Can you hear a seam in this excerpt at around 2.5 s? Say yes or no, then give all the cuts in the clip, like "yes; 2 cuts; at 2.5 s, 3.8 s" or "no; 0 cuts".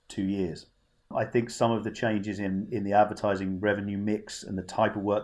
no; 1 cut; at 1.1 s